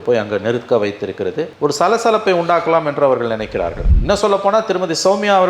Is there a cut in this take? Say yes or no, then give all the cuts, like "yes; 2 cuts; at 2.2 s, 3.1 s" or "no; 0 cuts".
yes; 1 cut; at 3.8 s